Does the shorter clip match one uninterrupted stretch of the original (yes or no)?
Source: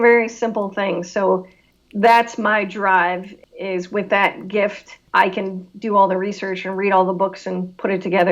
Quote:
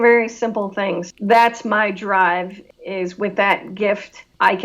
no